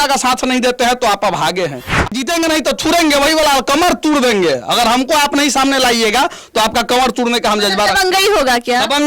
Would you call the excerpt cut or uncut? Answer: cut